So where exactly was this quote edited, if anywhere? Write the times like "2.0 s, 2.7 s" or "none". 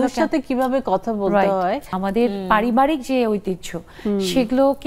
1.9 s